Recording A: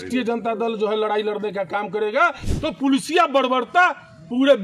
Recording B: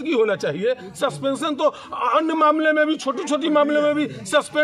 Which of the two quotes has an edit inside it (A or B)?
A